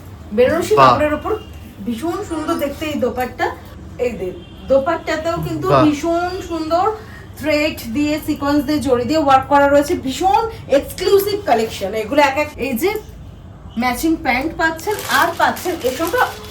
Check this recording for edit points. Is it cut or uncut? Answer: cut